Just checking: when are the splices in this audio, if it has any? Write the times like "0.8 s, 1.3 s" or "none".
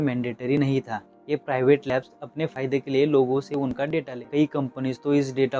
4.1 s